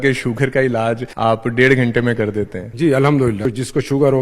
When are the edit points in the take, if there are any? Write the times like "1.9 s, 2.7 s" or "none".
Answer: 1.1 s, 2.6 s, 3.5 s